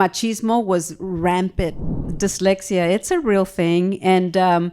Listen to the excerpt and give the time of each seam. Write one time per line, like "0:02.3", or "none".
0:02.1

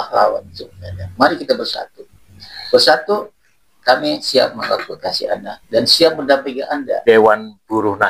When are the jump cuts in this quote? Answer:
0:07.0

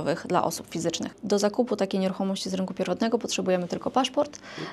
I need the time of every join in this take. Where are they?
0:01.2

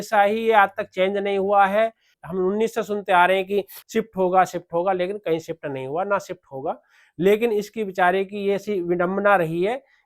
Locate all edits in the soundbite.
0:02.1
0:03.8

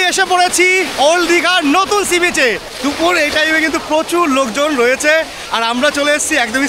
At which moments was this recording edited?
0:02.7

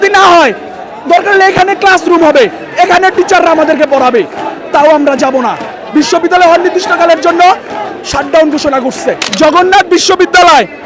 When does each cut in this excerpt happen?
0:09.3

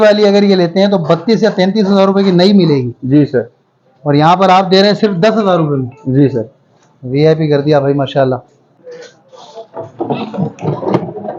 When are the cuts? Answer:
0:08.7

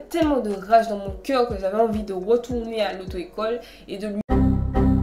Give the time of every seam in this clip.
none

